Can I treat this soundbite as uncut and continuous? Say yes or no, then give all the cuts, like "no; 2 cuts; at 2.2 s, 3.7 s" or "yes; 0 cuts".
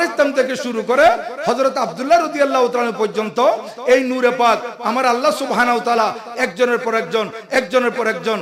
yes; 0 cuts